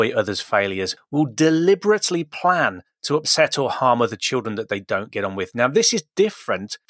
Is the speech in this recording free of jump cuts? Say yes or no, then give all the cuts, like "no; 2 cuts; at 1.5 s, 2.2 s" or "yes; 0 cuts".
no; 1 cut; at 0.9 s